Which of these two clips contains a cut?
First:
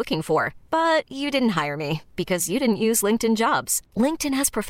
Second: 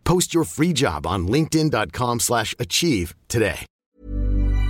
second; 1 cut; at 3.7 s

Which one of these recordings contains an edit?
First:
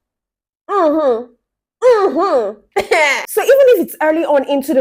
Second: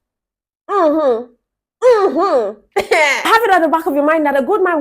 second; 1 cut; at 3.3 s

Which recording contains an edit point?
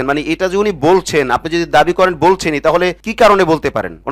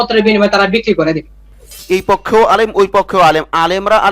second; 1 cut; at 1.5 s

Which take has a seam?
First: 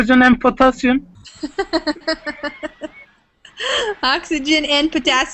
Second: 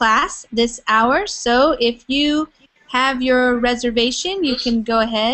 first; 1 cut; at 3.1 s

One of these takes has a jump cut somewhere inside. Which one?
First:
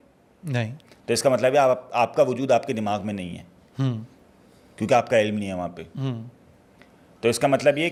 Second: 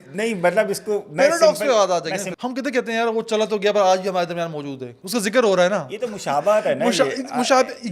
second; 1 cut; at 2.3 s

